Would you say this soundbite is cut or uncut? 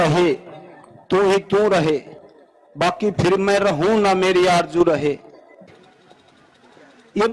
cut